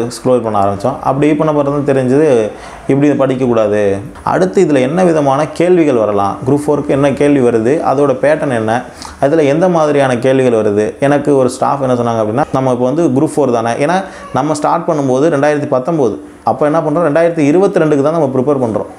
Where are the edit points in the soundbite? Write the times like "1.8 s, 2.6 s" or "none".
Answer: 4.0 s, 12.4 s